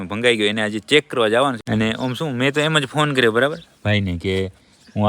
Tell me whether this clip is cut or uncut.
cut